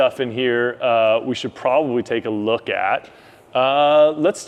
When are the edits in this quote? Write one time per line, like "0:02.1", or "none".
none